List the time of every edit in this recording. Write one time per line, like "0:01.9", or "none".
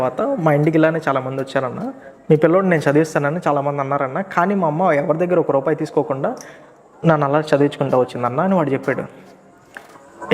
none